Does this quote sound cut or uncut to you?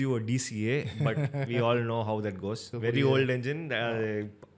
cut